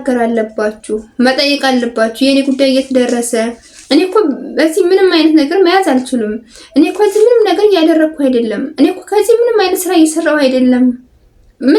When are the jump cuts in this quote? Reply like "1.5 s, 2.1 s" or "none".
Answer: none